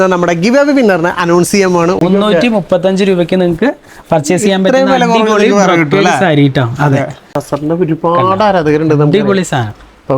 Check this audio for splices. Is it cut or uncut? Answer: cut